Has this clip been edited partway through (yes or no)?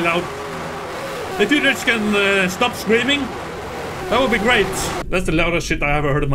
yes